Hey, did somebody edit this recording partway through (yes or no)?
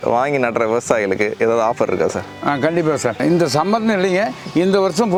no